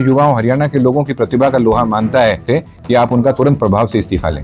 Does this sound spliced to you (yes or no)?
yes